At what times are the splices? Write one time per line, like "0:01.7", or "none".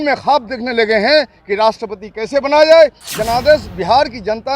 0:03.1